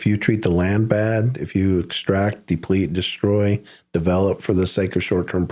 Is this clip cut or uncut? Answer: uncut